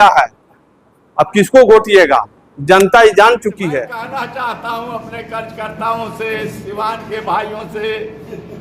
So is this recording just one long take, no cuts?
no; 1 cut; at 4.1 s

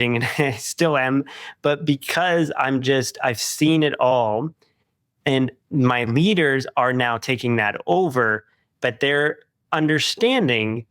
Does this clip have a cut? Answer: no; 0 cuts

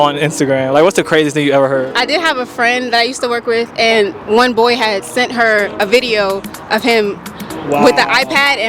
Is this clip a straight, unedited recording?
no; 1 cut; at 1.9 s

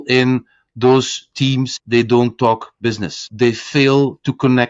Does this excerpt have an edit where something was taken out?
yes; 2 cuts; at 1.7 s, 3.3 s

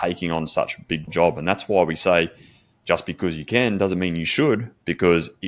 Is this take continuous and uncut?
no; 1 cut; at 1.1 s

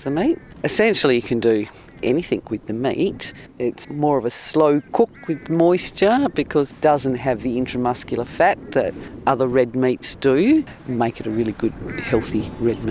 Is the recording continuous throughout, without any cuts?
no; 2 cuts; at 6.7 s, 10.8 s

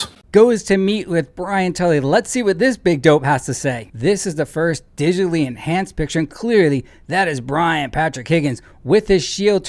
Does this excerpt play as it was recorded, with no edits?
no; 1 cut; at 3.9 s

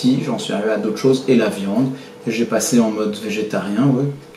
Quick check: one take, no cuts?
yes; 0 cuts

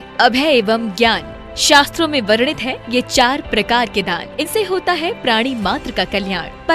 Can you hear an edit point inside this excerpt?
yes; 1 cut; at 4.5 s

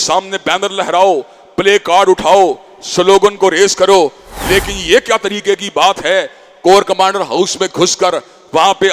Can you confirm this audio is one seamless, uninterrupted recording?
yes; 0 cuts

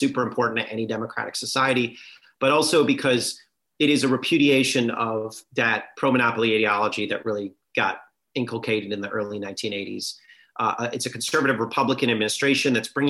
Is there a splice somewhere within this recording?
no; 0 cuts

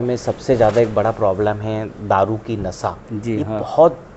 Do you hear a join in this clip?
no; 0 cuts

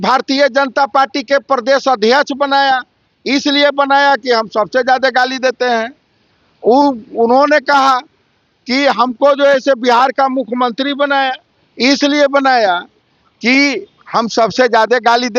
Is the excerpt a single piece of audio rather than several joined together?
yes; 0 cuts

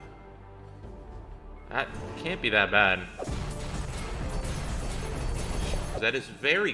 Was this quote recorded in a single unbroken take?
no; 2 cuts; at 3.2 s, 6.0 s

